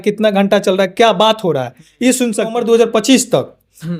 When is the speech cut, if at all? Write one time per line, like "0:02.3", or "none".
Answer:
0:02.5

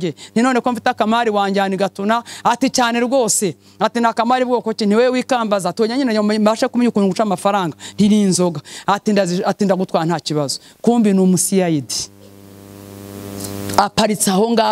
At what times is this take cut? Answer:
none

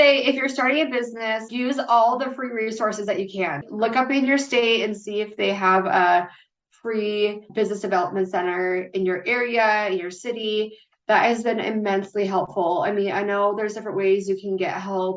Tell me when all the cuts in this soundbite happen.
0:01.5
0:03.6
0:07.5

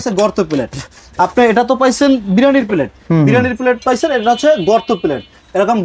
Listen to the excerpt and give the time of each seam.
none

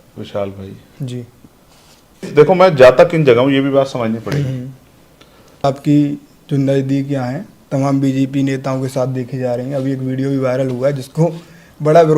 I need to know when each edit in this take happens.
0:02.3
0:05.6

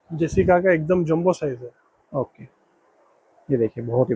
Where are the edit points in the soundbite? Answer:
none

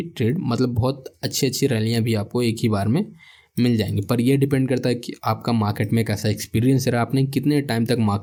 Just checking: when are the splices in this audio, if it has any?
none

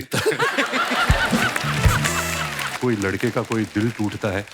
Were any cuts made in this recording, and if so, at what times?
0:02.8

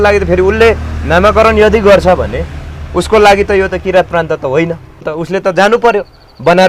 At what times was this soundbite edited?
0:05.2

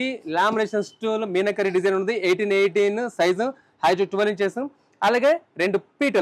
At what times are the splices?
none

